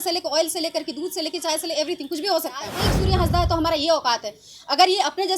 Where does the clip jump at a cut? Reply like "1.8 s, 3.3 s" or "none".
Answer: 2.9 s